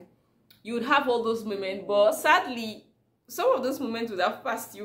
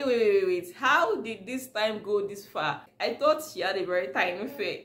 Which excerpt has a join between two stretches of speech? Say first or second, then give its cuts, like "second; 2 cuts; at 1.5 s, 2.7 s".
second; 1 cut; at 2.9 s